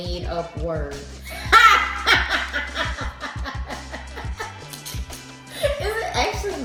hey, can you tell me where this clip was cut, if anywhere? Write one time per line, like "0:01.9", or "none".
none